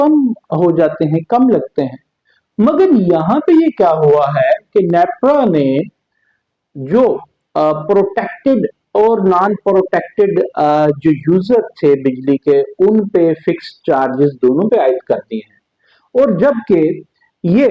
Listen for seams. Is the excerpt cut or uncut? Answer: uncut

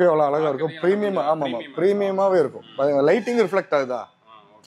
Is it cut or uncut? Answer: uncut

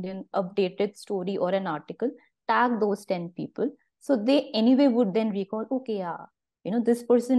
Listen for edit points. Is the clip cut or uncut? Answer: uncut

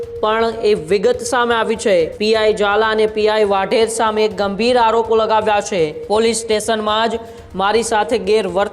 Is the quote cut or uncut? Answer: cut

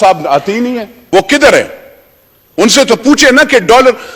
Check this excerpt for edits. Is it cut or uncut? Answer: cut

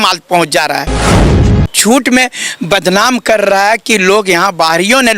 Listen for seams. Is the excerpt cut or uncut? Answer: cut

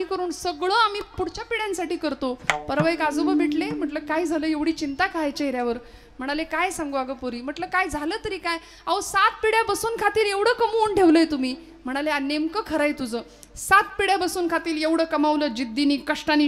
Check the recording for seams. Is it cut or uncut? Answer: uncut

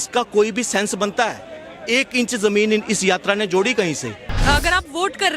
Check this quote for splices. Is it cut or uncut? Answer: cut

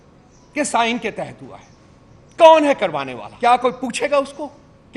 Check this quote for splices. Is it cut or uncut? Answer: cut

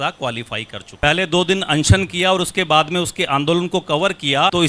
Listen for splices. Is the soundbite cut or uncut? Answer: cut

